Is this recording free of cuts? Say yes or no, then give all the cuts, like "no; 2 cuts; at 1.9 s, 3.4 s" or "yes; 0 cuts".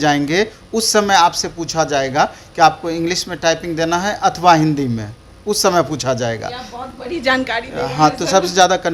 yes; 0 cuts